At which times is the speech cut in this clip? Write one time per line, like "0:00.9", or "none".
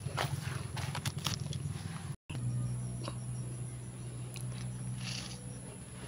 0:02.3